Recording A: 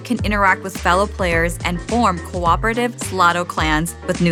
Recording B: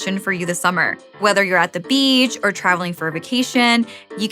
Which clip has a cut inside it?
B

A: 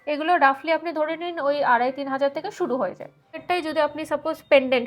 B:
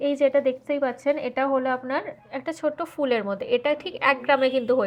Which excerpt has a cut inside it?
A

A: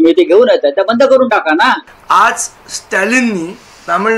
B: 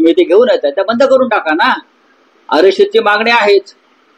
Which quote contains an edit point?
A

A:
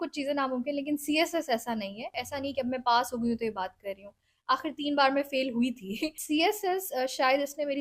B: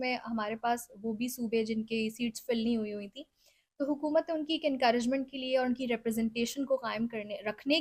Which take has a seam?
A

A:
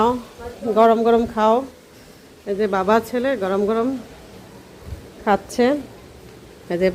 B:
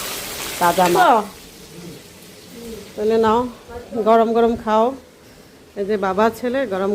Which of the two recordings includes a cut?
B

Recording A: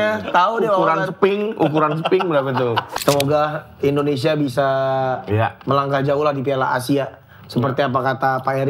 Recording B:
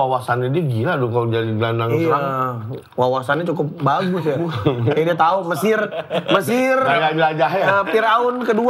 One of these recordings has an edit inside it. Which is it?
A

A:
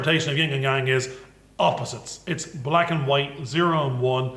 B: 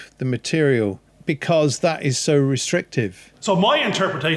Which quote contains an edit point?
B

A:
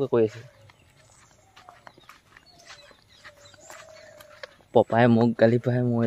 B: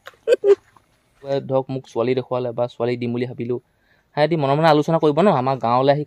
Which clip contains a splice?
B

